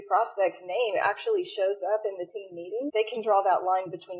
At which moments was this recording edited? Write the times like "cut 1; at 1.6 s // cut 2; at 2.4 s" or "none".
cut 1; at 2.9 s

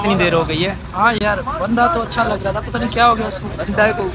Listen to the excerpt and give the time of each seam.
none

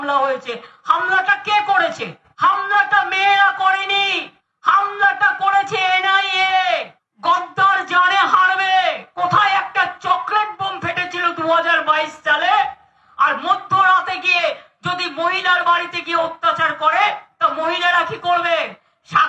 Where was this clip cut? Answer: none

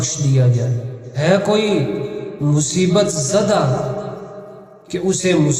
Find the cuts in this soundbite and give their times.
cut 1; at 1.2 s

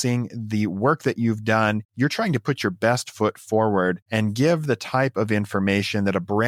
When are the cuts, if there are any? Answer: none

